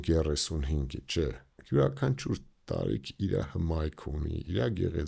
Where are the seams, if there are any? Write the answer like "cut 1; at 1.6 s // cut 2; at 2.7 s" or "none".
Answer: none